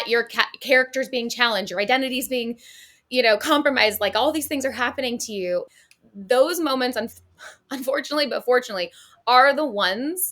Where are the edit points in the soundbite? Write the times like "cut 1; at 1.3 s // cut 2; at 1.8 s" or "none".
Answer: cut 1; at 5.7 s